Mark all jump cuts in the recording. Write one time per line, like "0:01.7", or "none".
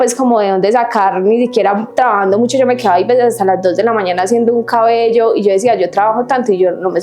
none